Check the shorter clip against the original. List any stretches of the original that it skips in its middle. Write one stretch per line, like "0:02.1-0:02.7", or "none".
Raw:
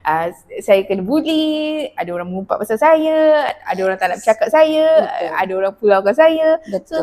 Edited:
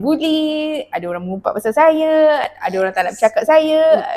none